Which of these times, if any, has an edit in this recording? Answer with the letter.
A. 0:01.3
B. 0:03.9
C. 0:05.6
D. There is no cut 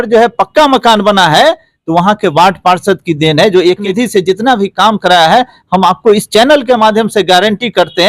B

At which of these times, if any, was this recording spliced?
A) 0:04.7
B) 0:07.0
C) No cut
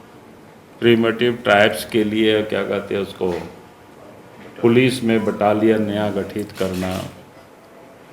C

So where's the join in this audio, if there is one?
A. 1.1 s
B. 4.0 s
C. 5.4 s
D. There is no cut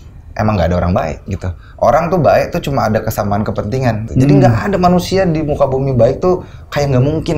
B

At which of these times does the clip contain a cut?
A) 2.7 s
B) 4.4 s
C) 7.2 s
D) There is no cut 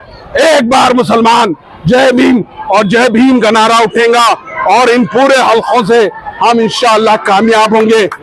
D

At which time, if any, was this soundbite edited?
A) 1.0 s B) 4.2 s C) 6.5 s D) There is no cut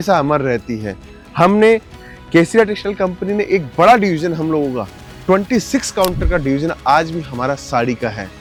D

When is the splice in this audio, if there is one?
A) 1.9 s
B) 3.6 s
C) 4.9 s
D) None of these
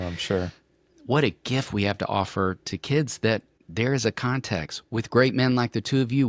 B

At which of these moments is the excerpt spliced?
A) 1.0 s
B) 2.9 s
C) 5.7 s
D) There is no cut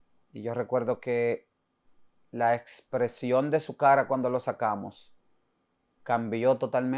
D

